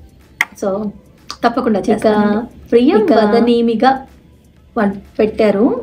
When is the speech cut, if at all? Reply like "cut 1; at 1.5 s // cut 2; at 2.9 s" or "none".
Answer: none